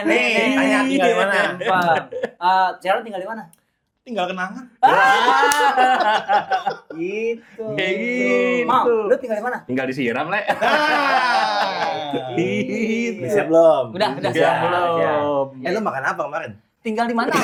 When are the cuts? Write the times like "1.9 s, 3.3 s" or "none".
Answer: none